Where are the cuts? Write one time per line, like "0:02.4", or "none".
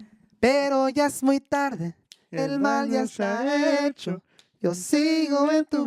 none